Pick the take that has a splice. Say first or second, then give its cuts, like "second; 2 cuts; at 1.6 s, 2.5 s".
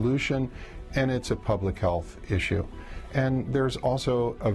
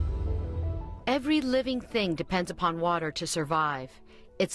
second; 1 cut; at 1.8 s